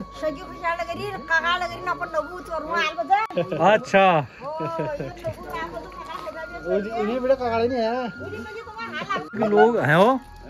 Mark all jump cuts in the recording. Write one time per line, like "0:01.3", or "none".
0:09.2

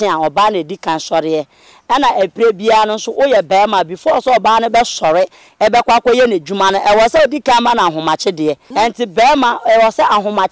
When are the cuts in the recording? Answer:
0:08.6

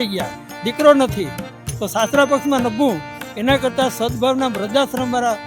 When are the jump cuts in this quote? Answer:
none

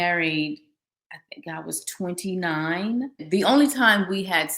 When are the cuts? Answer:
0:03.2

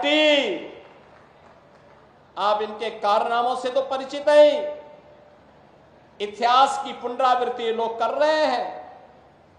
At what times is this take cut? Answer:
none

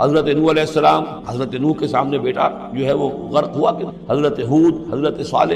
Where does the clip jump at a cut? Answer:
0:01.2
0:03.9

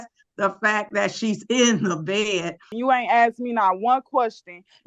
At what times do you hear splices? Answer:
0:02.7

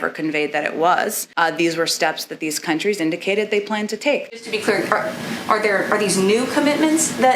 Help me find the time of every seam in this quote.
0:04.3

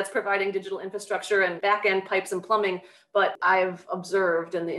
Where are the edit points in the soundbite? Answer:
0:01.6
0:03.3

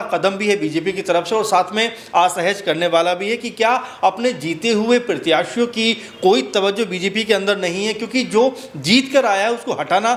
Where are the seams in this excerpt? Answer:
none

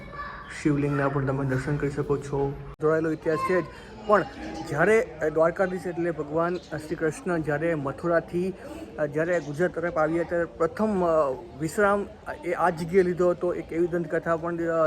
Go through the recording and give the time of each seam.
0:02.8

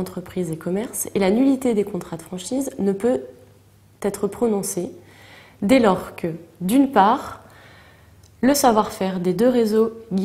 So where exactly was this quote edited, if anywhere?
none

